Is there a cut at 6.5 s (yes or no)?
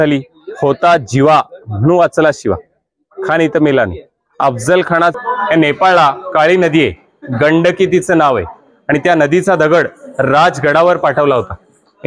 no